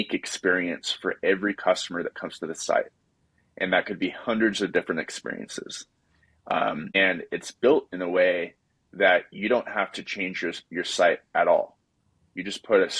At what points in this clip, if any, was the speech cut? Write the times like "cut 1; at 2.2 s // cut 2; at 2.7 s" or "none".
cut 1; at 7.0 s